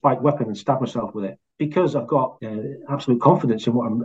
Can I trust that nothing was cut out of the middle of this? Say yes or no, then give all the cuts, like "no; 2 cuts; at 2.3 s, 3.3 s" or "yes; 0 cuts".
no; 2 cuts; at 1.4 s, 2.4 s